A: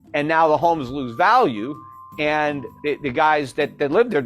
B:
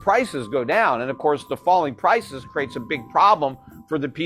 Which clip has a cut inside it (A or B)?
A